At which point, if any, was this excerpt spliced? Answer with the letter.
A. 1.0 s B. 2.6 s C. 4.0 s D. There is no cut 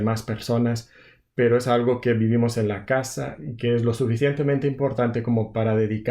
D